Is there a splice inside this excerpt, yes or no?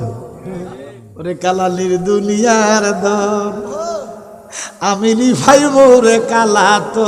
yes